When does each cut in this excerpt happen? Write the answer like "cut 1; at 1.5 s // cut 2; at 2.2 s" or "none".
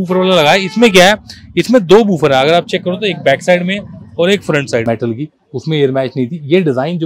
cut 1; at 4.8 s